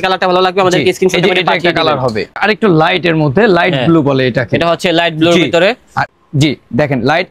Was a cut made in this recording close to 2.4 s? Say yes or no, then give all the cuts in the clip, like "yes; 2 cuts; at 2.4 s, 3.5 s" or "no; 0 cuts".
yes; 2 cuts; at 2.4 s, 6.0 s